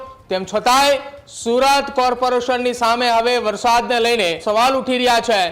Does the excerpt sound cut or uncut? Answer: cut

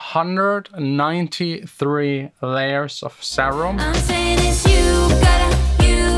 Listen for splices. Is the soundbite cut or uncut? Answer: cut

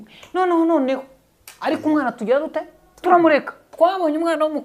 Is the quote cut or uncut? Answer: cut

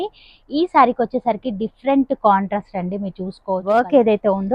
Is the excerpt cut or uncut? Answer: cut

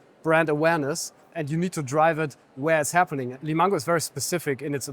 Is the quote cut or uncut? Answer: cut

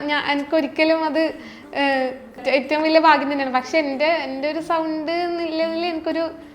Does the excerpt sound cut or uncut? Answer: cut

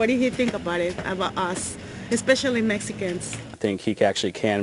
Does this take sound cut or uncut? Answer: cut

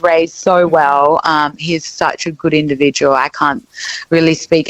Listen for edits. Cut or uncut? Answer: uncut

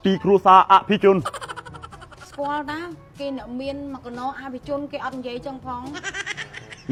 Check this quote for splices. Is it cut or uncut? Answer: uncut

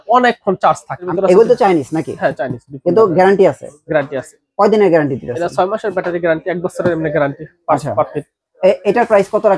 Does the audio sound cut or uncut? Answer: cut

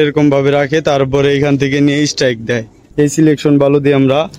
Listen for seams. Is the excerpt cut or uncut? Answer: cut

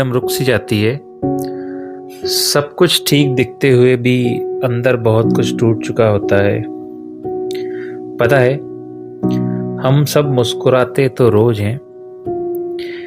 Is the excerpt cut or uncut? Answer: cut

